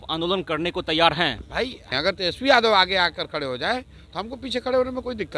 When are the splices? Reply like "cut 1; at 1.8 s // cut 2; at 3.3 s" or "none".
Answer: cut 1; at 1.9 s